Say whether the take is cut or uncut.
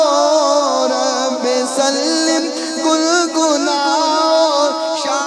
uncut